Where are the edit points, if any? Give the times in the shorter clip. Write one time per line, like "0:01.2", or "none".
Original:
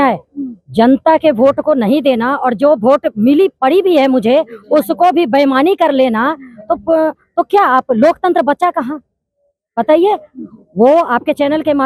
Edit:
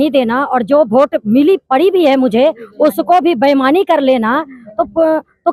none

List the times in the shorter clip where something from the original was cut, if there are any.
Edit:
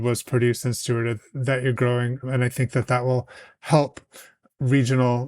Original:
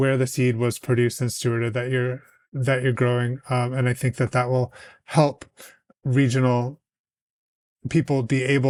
0:01.2
0:02.2

